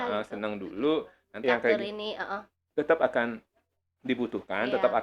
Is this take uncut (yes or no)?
no